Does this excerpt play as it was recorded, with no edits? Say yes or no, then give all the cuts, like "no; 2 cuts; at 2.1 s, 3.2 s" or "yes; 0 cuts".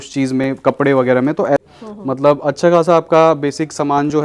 no; 1 cut; at 1.6 s